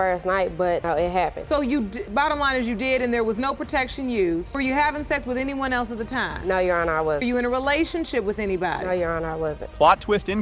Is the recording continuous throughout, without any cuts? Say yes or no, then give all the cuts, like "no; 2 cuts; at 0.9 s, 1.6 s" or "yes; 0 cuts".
yes; 0 cuts